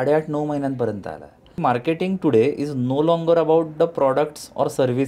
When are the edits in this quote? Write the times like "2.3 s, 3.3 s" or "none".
1.5 s